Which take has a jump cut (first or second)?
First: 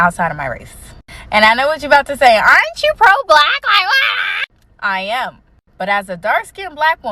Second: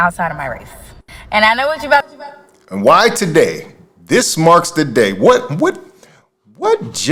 first